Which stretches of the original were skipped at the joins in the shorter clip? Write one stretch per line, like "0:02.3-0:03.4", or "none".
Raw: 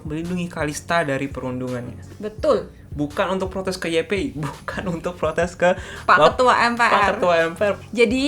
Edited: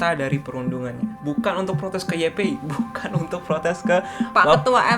0:02.0-0:02.8